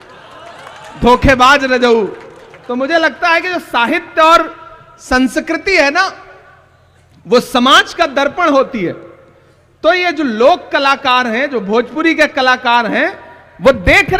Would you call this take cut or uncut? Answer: uncut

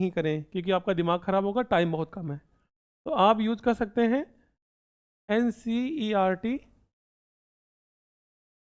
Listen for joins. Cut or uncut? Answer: uncut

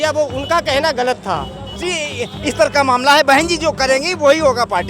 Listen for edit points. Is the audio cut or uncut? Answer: cut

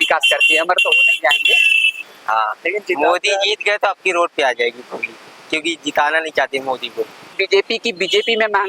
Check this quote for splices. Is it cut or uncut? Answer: cut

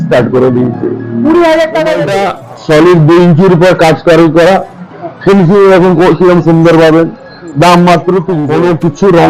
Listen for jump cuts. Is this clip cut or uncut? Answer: cut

